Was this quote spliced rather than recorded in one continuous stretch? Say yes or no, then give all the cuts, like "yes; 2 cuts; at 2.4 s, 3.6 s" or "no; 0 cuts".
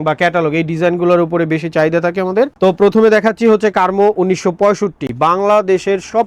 no; 0 cuts